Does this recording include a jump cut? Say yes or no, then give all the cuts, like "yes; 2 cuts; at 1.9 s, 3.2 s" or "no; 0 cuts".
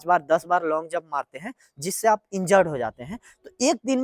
no; 0 cuts